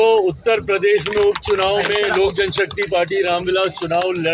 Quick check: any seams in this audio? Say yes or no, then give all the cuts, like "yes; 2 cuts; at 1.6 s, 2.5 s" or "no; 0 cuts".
no; 0 cuts